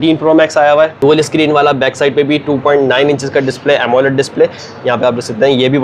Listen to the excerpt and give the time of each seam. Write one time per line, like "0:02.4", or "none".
0:00.9